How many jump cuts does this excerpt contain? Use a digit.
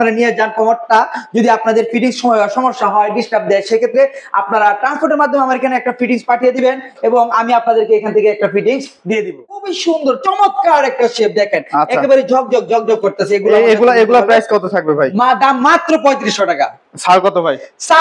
1